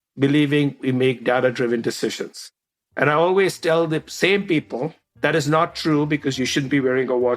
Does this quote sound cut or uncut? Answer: cut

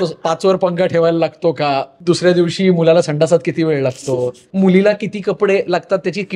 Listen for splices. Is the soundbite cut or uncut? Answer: cut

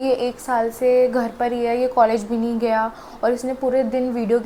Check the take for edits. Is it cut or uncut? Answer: uncut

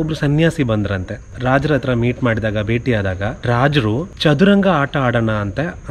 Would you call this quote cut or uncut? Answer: cut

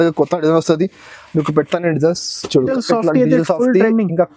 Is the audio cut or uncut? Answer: cut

